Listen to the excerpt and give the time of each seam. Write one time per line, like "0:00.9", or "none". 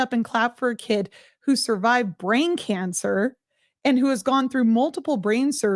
none